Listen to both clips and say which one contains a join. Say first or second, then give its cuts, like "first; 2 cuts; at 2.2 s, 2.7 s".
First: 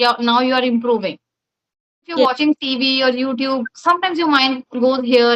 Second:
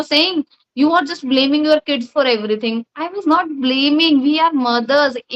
first; 1 cut; at 2.2 s